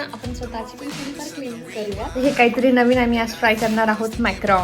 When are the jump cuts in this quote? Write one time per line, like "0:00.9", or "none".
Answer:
0:02.2